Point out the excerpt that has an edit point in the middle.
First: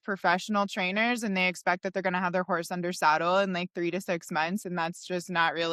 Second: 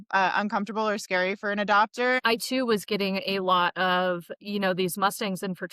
second; 1 cut; at 2.2 s

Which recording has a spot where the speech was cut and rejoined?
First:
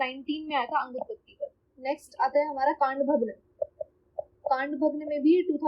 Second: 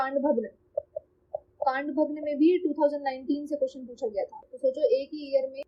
first; 1 cut; at 1.6 s

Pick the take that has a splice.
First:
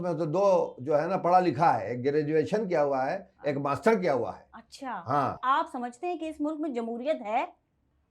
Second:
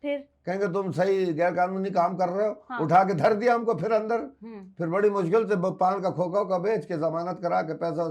first; 1 cut; at 5.4 s

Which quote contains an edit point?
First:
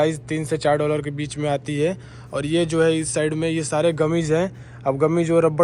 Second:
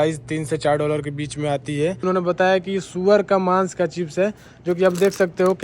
second; 1 cut; at 2.0 s

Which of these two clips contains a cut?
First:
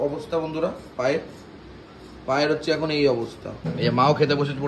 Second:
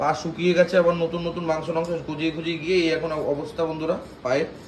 first; 1 cut; at 3.6 s

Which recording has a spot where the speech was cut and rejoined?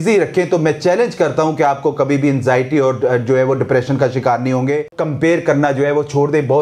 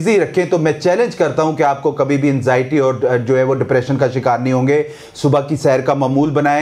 first; 1 cut; at 5.0 s

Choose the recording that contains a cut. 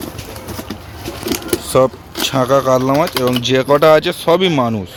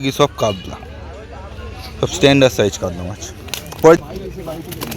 second; 1 cut; at 4.0 s

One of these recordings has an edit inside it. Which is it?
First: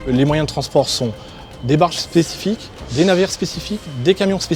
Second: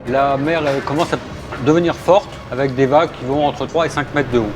second; 2 cuts; at 2.4 s, 3.6 s

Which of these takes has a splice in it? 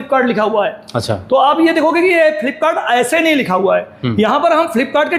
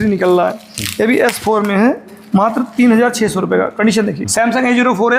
second; 1 cut; at 4.3 s

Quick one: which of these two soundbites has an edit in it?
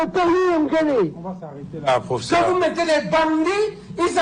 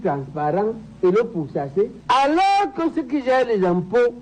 second; 1 cut; at 2.0 s

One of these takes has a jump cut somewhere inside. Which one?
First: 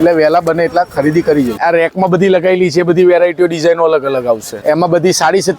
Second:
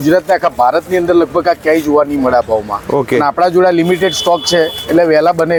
first; 2 cuts; at 1.6 s, 4.6 s

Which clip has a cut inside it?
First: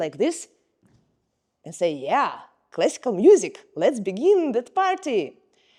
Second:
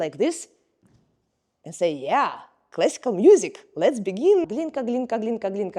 second; 1 cut; at 4.4 s

